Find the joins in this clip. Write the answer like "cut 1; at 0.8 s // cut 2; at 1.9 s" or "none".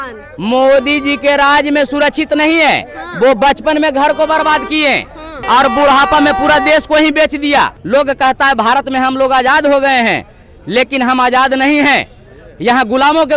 cut 1; at 7.8 s